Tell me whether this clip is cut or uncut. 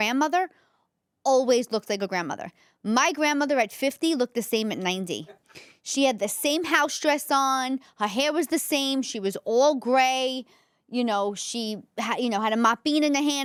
uncut